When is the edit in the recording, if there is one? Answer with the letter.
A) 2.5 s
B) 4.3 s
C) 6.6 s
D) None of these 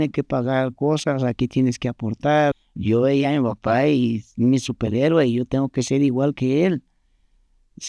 A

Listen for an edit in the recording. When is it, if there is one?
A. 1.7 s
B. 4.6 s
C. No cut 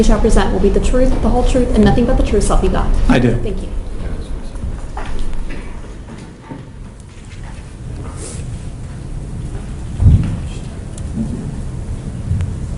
A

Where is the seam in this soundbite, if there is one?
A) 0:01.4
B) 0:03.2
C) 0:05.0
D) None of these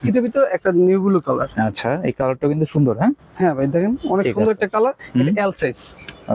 D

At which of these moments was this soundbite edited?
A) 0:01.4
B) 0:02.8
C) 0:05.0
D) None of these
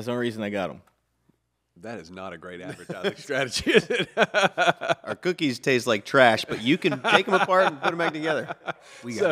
D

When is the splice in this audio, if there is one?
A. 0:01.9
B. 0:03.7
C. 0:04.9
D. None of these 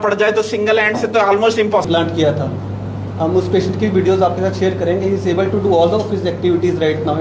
A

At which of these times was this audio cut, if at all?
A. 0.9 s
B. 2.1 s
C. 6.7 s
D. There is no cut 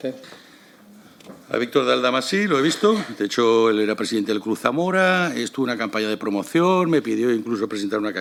D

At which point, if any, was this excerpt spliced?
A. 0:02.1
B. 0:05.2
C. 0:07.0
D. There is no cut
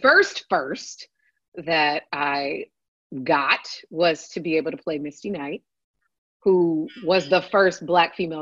D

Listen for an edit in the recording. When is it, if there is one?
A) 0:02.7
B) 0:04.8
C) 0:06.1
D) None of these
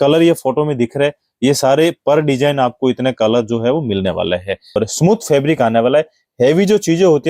B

